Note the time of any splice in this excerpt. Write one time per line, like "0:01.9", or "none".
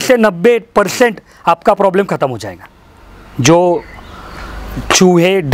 none